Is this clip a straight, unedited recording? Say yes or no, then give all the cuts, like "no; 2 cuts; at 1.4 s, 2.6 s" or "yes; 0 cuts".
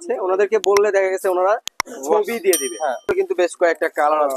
no; 1 cut; at 3.1 s